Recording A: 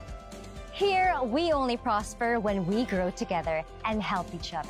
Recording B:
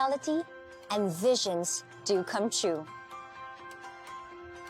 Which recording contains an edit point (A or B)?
B